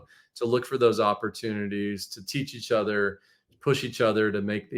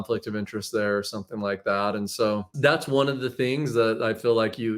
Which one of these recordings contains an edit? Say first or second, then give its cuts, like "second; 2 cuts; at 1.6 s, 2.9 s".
second; 1 cut; at 2.5 s